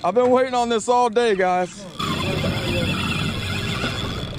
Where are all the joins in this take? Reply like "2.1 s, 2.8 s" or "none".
2.0 s